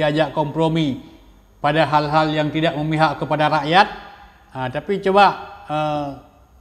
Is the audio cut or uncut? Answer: uncut